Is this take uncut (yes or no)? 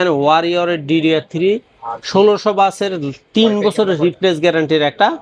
yes